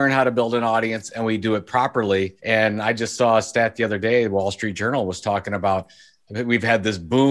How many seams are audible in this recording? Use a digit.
1